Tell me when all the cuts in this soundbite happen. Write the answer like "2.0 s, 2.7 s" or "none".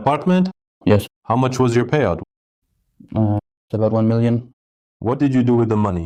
none